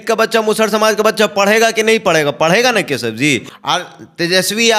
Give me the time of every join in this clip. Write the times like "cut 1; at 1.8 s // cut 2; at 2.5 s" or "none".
cut 1; at 3.5 s